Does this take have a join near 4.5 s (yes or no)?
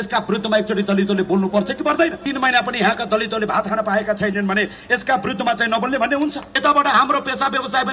no